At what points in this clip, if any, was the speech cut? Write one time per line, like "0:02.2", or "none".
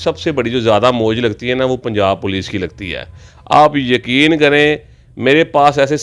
none